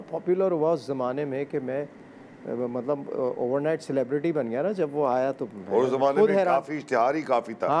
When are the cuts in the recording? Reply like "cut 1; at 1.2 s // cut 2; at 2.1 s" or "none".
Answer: none

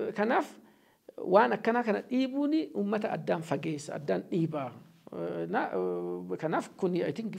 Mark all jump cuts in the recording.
none

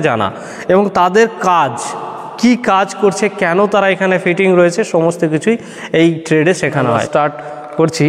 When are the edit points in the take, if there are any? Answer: cut 1; at 7.0 s

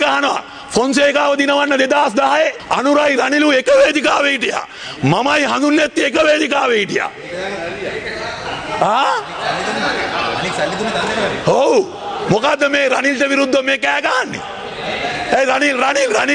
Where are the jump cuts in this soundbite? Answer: none

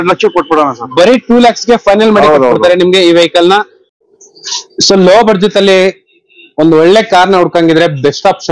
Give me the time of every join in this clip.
none

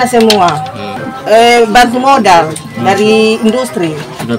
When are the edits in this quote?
cut 1; at 0.9 s

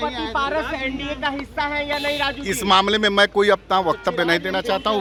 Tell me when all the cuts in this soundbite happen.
none

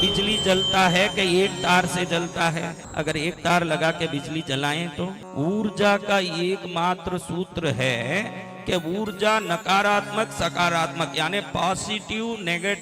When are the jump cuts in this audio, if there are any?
cut 1; at 2.8 s // cut 2; at 5.2 s

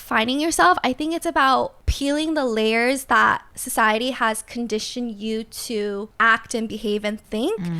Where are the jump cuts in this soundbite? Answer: cut 1; at 1.8 s // cut 2; at 3.6 s // cut 3; at 6.1 s

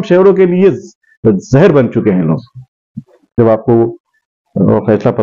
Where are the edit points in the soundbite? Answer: cut 1; at 3.3 s

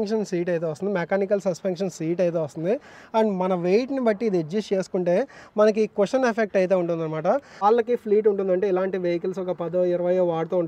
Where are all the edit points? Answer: cut 1; at 7.6 s

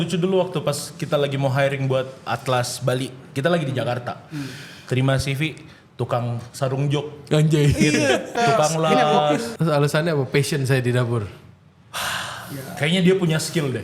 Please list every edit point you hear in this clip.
cut 1; at 8.3 s // cut 2; at 9.5 s

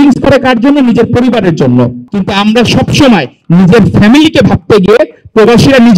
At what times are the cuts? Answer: cut 1; at 2.1 s

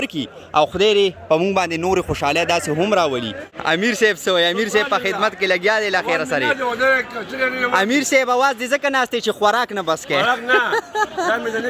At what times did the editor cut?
cut 1; at 3.4 s

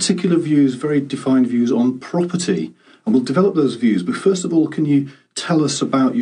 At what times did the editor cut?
cut 1; at 2.7 s

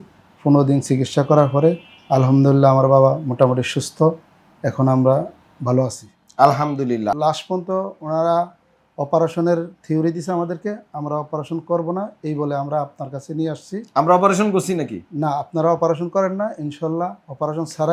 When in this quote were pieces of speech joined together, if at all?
cut 1; at 7.1 s

